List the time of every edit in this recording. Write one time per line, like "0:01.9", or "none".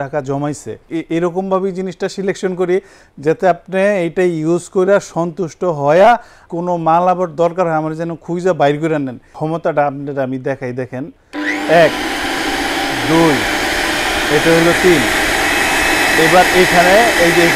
0:00.9
0:06.4
0:09.3
0:11.2